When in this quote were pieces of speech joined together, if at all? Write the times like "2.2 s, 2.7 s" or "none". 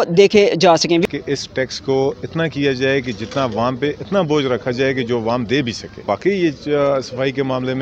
1.0 s, 6.0 s